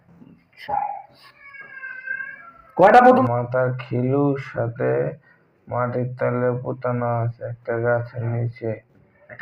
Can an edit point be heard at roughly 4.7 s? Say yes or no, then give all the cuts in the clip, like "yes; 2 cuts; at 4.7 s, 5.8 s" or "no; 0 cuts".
no; 1 cut; at 3.2 s